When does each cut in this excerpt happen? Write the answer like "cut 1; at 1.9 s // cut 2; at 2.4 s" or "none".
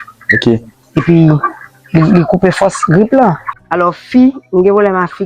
cut 1; at 3.5 s